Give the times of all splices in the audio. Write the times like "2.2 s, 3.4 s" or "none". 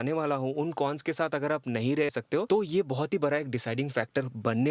2.2 s